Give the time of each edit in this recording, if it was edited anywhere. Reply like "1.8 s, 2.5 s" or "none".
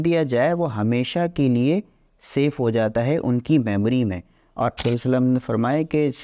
4.8 s